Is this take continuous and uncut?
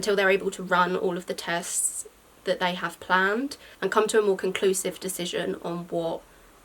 yes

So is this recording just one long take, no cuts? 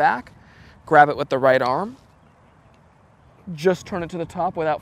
yes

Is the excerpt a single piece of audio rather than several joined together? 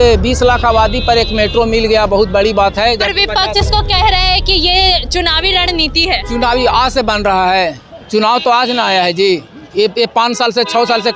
yes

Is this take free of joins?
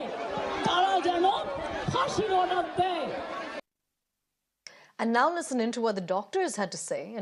no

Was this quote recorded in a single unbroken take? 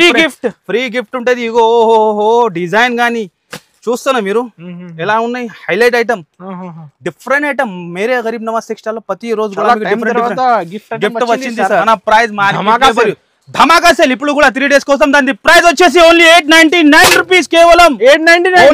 no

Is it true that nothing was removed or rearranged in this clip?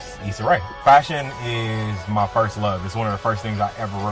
no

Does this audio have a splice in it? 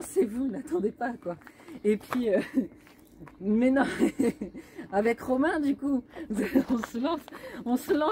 no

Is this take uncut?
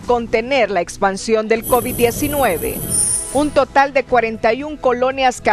no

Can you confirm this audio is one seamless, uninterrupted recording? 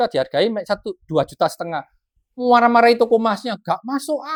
yes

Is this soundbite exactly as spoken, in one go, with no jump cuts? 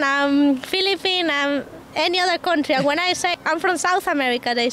yes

